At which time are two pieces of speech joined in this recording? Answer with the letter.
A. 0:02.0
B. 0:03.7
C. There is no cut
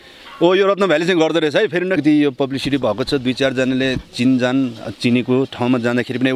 A